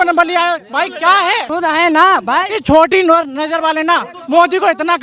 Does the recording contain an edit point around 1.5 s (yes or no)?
yes